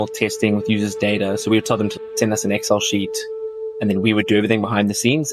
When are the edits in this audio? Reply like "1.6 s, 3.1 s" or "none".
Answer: none